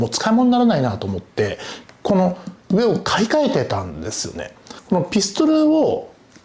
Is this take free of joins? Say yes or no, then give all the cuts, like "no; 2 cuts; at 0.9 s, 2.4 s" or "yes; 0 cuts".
no; 1 cut; at 4.7 s